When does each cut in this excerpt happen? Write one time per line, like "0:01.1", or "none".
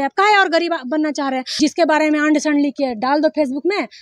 0:01.6